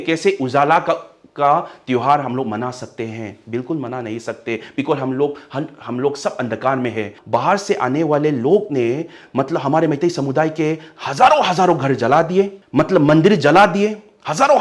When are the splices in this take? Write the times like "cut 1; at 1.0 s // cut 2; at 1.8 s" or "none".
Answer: cut 1; at 7.2 s // cut 2; at 12.6 s